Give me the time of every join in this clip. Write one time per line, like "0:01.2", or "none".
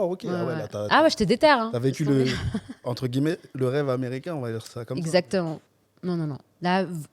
0:05.7